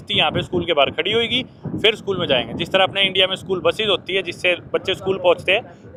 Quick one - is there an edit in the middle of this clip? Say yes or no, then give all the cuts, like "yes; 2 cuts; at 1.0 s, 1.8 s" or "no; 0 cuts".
no; 0 cuts